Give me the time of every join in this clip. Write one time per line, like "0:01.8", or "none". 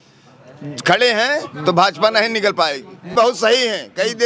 0:03.0